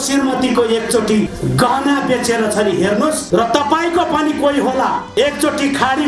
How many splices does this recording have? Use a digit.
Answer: 3